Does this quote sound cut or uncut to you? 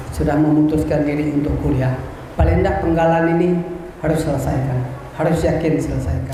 uncut